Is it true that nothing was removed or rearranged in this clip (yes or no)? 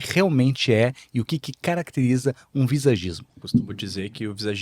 no